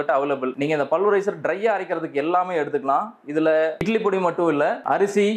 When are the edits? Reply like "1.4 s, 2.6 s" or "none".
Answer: none